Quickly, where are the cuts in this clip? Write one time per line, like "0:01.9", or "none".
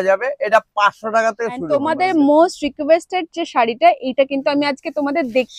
0:01.7